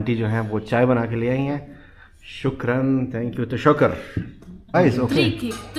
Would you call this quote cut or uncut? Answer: cut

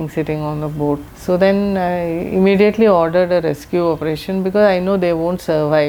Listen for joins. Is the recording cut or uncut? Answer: uncut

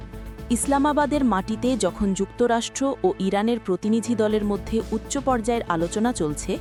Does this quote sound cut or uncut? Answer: uncut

